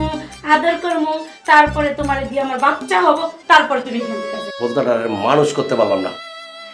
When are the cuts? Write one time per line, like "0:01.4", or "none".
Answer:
0:04.3